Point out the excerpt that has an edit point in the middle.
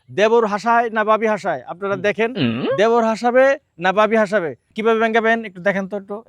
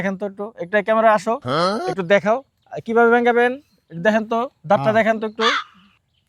first; 1 cut; at 4.7 s

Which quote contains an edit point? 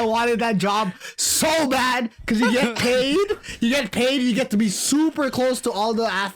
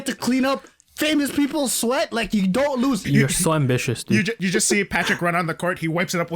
second; 2 cuts; at 3.0 s, 4.4 s

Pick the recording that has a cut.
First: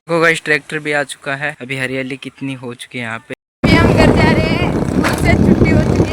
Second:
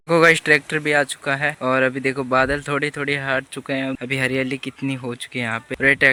first; 2 cuts; at 1.6 s, 3.2 s

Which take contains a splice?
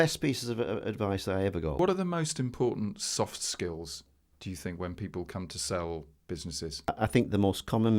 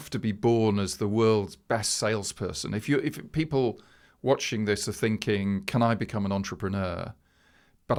first; 2 cuts; at 1.8 s, 6.9 s

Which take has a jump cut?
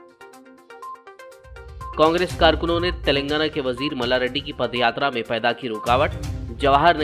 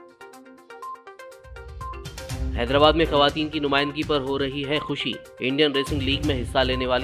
first; 1 cut; at 1.8 s

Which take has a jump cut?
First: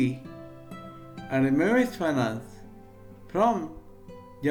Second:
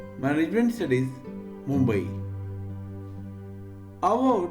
second; 2 cuts; at 2.1 s, 3.8 s

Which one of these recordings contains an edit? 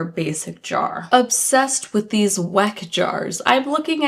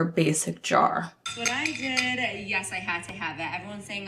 first; 1 cut; at 1.0 s

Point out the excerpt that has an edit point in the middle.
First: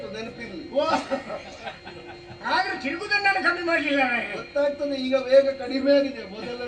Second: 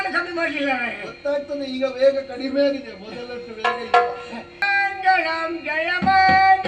second; 1 cut; at 4.6 s

